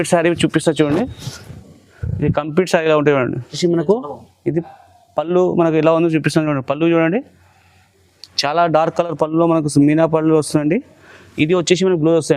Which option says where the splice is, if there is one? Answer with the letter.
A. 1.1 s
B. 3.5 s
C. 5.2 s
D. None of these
B